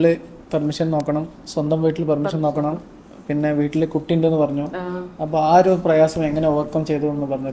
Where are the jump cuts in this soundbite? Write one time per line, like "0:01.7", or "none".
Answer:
none